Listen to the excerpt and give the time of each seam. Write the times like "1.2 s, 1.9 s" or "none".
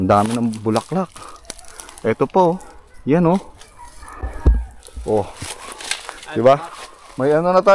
none